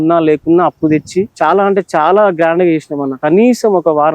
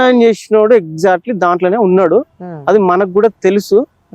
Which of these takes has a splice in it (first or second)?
first